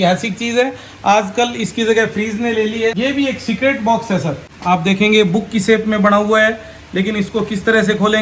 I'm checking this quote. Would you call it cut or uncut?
cut